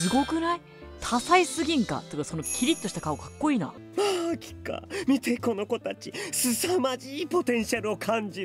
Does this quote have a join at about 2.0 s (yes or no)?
no